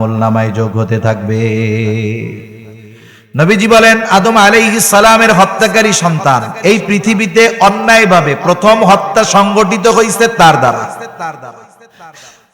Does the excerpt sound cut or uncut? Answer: uncut